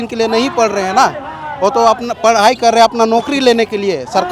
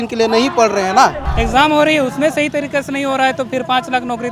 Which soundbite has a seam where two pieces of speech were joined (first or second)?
second